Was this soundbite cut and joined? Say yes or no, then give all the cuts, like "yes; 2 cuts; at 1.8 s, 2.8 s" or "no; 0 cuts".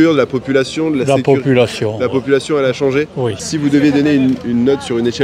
yes; 1 cut; at 3.5 s